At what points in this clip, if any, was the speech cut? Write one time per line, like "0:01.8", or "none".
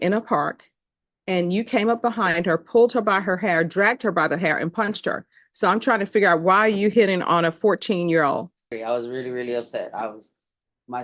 0:08.7